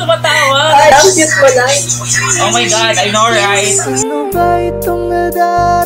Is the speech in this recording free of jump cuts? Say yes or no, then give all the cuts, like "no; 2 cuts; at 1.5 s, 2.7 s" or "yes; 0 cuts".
no; 1 cut; at 0.9 s